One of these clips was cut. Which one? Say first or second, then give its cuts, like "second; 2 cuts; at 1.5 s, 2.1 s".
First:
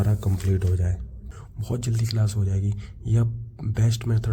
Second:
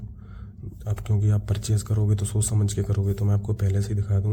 first; 1 cut; at 1.2 s